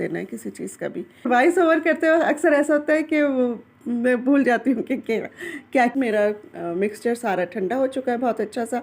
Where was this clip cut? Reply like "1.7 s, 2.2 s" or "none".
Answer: 1.3 s, 5.9 s